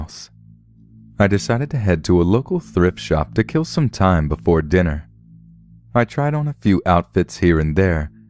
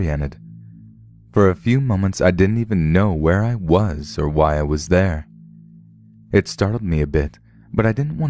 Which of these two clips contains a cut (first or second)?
second